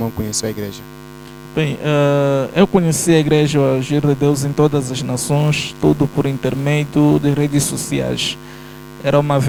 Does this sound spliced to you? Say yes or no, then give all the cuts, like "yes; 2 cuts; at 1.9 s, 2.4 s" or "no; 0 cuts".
no; 0 cuts